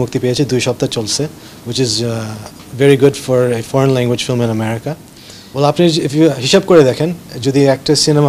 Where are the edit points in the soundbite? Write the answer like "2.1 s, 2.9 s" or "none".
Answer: 5.4 s